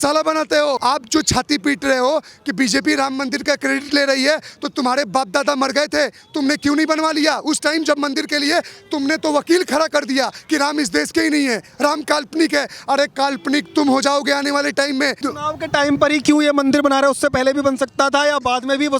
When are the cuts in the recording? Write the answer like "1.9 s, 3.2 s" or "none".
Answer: 0.8 s, 15.3 s